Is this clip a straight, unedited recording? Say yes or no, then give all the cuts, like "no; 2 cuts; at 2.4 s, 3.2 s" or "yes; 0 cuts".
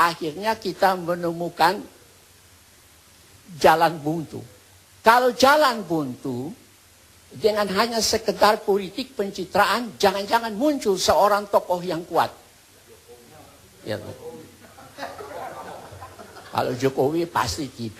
yes; 0 cuts